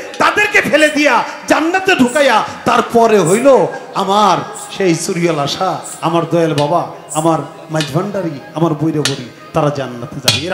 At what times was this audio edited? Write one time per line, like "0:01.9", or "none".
none